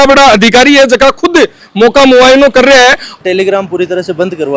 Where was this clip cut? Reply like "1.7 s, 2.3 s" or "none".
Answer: 3.1 s